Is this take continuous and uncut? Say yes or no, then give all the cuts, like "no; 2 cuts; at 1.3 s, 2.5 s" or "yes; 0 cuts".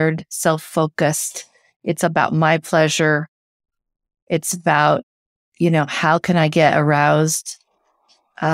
yes; 0 cuts